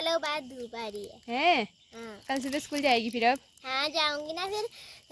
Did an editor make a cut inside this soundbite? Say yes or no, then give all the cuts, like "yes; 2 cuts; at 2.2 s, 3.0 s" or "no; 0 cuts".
no; 0 cuts